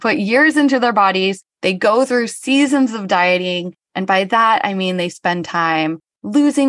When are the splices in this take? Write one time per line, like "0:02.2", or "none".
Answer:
none